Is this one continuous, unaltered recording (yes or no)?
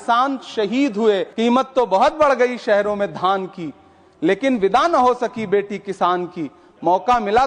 no